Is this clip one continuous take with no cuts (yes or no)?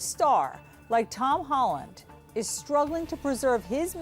yes